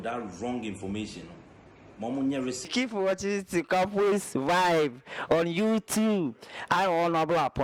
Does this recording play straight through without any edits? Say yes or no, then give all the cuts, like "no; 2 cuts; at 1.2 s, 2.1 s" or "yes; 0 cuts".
no; 1 cut; at 2.6 s